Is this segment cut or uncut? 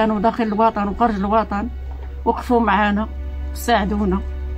uncut